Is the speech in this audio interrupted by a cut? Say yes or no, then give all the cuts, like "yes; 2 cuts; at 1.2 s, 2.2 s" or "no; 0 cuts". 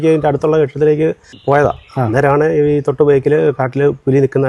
yes; 1 cut; at 1.3 s